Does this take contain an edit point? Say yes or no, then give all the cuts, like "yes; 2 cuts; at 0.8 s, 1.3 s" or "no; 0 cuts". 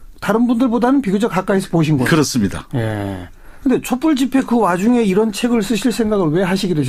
no; 0 cuts